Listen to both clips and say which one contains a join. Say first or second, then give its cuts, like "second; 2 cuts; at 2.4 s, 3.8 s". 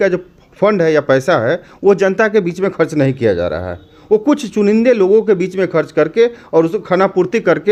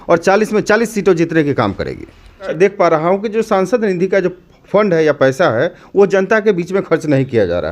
second; 1 cut; at 2.5 s